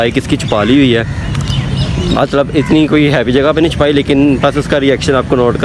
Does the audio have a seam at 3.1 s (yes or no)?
no